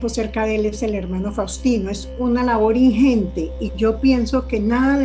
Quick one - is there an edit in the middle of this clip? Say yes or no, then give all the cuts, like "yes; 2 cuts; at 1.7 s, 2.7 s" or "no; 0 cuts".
no; 0 cuts